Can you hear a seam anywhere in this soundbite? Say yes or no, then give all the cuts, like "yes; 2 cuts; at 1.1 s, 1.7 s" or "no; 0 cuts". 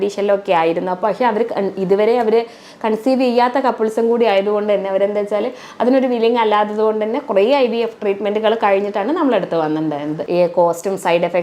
yes; 1 cut; at 10.3 s